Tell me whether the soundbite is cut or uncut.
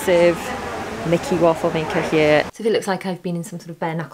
cut